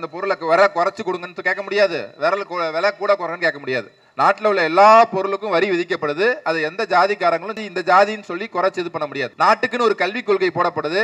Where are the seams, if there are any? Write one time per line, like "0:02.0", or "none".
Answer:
0:07.6

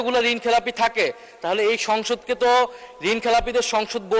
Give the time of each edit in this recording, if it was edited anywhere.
none

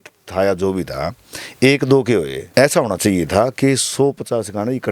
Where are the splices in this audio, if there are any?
0:02.4

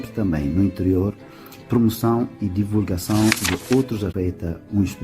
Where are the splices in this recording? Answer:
0:04.1

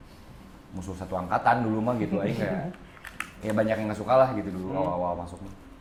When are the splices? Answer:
none

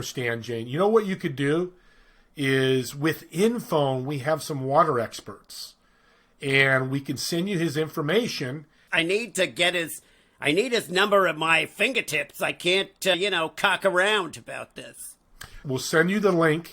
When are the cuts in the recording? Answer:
0:08.8
0:13.1
0:15.5

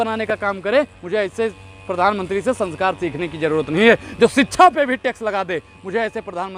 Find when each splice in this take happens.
none

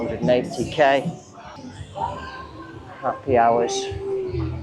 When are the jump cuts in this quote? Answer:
0:01.5

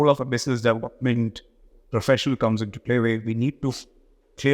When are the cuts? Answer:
none

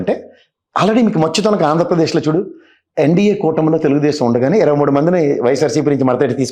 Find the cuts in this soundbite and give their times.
none

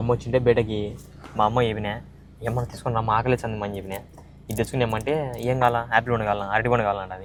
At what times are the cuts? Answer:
none

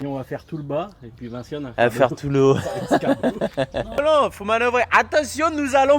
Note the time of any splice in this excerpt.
0:04.0

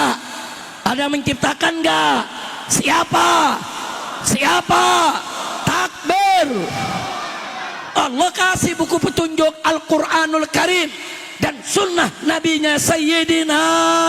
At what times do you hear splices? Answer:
none

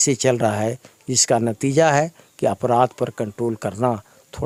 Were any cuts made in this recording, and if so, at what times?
none

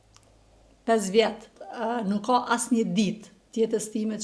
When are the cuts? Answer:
0:01.6

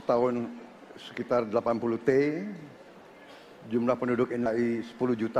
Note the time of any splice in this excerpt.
0:04.5

